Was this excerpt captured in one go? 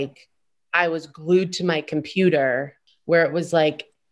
no; 1 cut; at 2.8 s

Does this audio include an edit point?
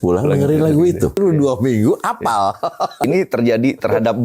yes; 2 cuts; at 1.2 s, 3.1 s

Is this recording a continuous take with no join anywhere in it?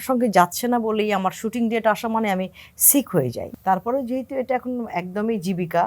no; 1 cut; at 3.4 s

